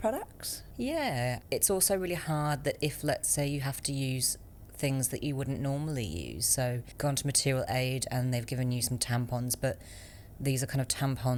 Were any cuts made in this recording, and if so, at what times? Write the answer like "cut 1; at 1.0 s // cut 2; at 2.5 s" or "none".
none